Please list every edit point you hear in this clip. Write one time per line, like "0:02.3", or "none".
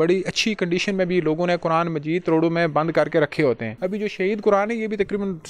0:03.7